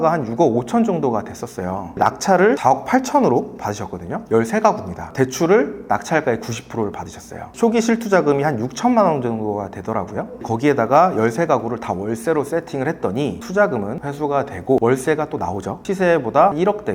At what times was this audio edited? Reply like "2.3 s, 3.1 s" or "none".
2.6 s, 4.2 s, 7.5 s, 15.8 s